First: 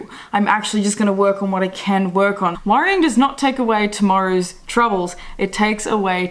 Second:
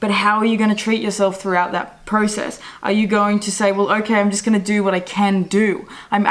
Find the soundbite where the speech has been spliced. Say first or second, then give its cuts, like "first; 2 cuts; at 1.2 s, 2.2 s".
first; 1 cut; at 2.6 s